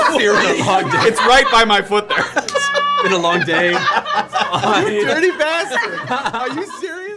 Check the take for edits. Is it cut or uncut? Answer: uncut